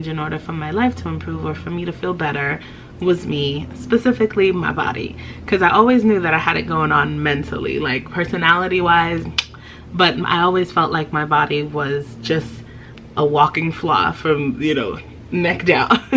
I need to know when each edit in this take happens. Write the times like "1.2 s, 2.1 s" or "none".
none